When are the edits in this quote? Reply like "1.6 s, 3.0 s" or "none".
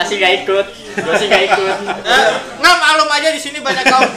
2.0 s